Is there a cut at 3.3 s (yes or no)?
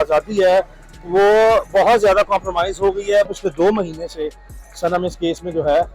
yes